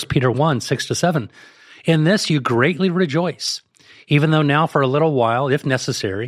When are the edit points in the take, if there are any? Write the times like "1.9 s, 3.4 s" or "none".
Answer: none